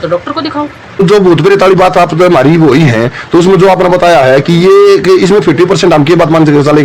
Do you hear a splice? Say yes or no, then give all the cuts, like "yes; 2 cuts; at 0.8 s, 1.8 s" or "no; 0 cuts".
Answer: yes; 1 cut; at 1.0 s